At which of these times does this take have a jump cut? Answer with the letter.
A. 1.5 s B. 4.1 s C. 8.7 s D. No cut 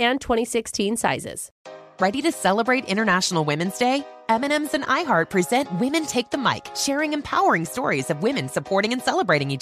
A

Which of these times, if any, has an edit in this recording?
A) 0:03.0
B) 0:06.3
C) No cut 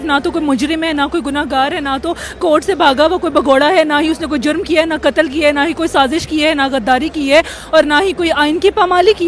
C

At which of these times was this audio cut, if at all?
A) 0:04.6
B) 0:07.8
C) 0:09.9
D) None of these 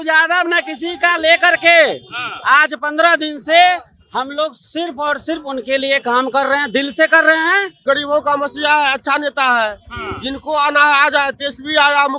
B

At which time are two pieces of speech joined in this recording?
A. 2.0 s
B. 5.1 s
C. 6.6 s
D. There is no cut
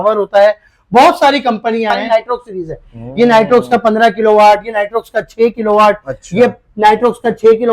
A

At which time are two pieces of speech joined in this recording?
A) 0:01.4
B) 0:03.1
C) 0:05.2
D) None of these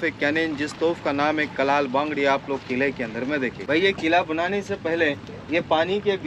D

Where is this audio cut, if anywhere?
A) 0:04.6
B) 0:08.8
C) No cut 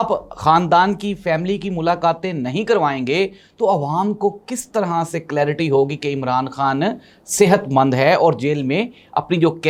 C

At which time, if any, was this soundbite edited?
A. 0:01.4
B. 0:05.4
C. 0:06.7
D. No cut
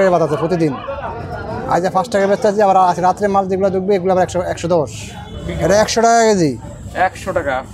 B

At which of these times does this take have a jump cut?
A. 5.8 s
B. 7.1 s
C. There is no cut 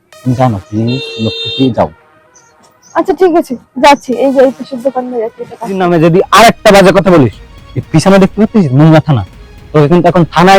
A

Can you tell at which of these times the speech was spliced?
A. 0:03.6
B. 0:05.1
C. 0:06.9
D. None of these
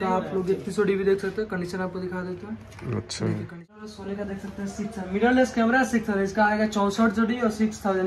A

